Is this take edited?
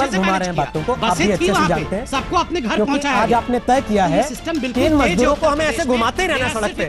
no; 0 cuts

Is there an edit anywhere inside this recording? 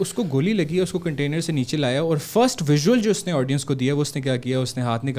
no; 0 cuts

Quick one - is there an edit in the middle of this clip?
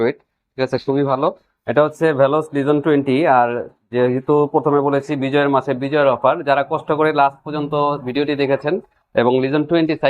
yes; 1 cut; at 1.5 s

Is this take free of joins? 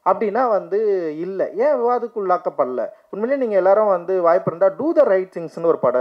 no; 1 cut; at 3.0 s

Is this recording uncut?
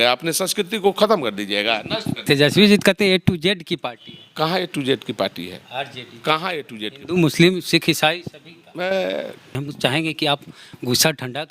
no; 1 cut; at 9.7 s

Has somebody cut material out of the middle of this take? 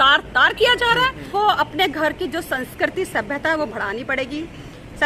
yes; 1 cut; at 1.3 s

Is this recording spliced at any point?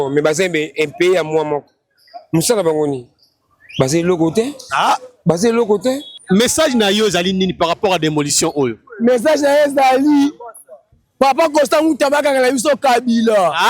yes; 1 cut; at 6.1 s

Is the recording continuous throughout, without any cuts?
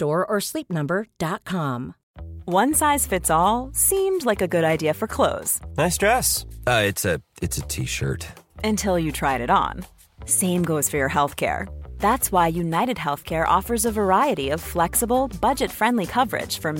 no; 1 cut; at 2.0 s

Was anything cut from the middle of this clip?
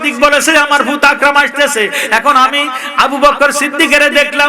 no; 0 cuts

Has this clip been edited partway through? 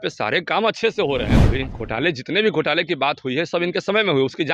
yes; 1 cut; at 1.3 s

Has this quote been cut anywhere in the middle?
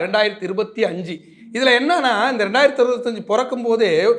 no; 0 cuts

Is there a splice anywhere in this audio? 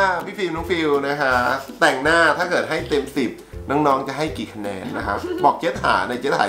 no; 0 cuts

